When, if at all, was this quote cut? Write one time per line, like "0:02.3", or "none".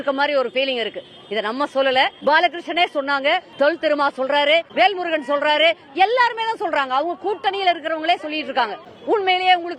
0:02.1
0:03.5
0:04.7
0:08.9